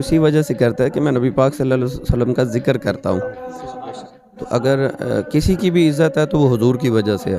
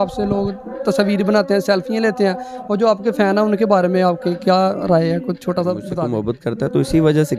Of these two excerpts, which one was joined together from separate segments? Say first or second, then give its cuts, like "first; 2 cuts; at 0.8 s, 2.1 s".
second; 1 cut; at 5.9 s